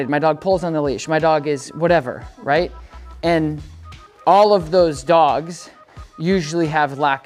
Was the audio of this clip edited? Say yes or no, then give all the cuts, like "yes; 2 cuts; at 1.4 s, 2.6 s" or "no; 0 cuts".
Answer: no; 0 cuts